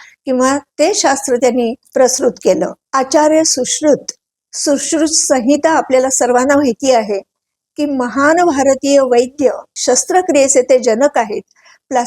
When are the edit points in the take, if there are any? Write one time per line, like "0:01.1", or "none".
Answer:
0:02.8